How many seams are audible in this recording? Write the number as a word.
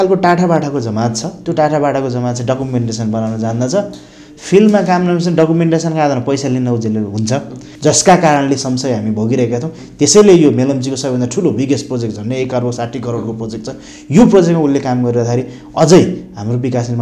one